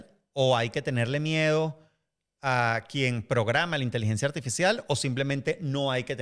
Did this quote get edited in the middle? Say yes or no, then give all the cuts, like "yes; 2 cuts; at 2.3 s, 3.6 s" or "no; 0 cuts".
no; 0 cuts